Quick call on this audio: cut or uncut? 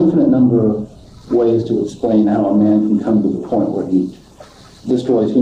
uncut